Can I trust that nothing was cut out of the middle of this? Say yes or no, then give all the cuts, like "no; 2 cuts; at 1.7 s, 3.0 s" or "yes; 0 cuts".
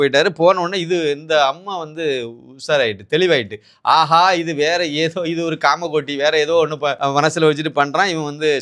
no; 1 cut; at 7.0 s